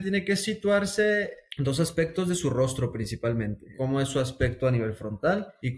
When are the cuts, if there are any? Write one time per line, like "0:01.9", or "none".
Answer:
0:03.6